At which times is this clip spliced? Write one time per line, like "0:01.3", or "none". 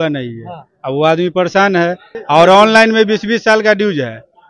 0:02.1